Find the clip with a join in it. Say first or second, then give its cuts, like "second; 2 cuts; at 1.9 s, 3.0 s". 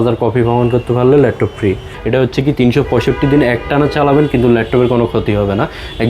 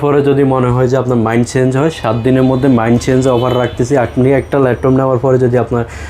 first; 1 cut; at 1.9 s